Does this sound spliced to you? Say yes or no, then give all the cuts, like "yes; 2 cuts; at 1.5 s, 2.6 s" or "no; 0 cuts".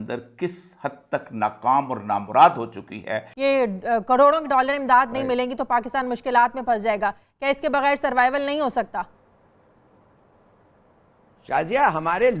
yes; 1 cut; at 3.2 s